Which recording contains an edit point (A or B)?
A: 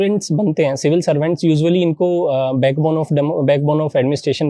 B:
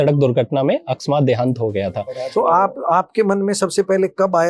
B